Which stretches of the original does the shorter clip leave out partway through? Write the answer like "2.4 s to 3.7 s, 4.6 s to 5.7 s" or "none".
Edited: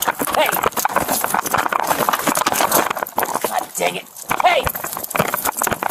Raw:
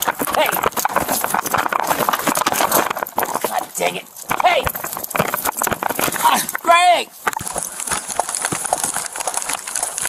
none